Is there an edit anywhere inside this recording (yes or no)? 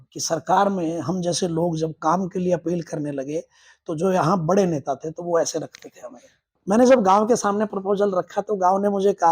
yes